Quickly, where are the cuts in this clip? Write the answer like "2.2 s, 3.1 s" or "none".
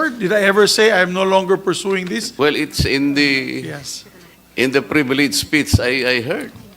2.2 s